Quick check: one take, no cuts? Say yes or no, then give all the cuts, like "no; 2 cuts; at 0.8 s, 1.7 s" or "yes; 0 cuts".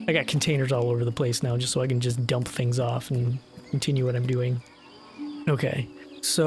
no; 1 cut; at 5.4 s